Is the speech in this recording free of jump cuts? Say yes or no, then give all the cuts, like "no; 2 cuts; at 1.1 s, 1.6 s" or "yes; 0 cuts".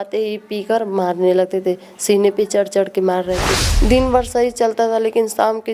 no; 1 cut; at 3.6 s